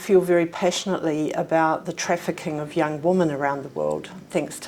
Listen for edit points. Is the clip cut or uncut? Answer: uncut